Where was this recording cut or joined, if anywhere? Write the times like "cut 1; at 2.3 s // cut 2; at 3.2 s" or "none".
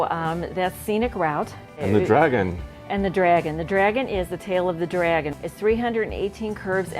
cut 1; at 1.8 s // cut 2; at 5.3 s